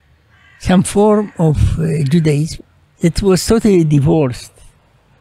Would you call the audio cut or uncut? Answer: cut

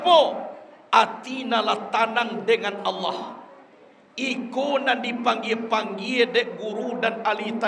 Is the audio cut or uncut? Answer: uncut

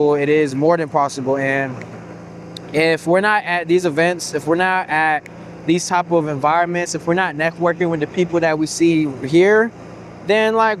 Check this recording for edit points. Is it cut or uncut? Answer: uncut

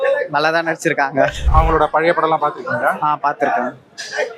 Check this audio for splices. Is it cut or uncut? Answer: uncut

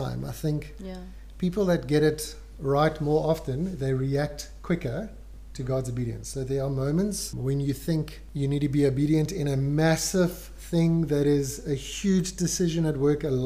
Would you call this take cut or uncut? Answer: uncut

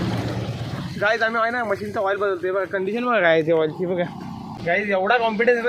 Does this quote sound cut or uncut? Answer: cut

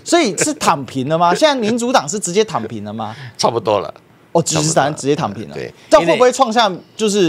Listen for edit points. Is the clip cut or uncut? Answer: uncut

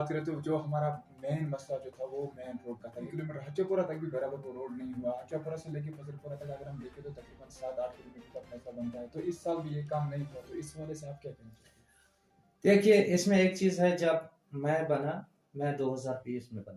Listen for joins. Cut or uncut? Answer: uncut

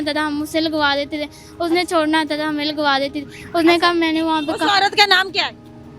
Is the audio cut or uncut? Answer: uncut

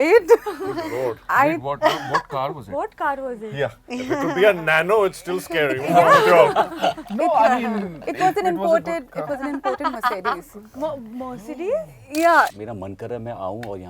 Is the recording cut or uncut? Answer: cut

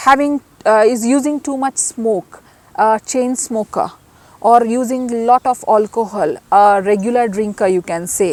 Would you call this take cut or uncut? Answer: uncut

